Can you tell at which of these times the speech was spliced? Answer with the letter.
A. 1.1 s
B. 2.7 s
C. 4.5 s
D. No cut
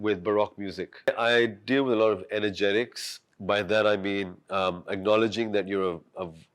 A